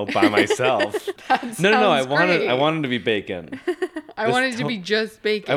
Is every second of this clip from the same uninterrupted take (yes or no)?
no